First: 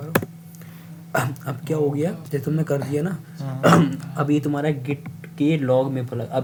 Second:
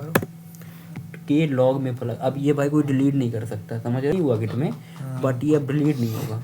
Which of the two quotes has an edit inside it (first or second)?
second